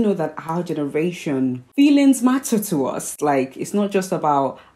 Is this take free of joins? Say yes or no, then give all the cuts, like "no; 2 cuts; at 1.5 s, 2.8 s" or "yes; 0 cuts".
yes; 0 cuts